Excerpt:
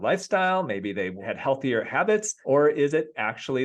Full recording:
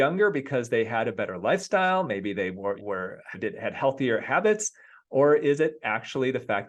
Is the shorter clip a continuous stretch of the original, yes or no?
no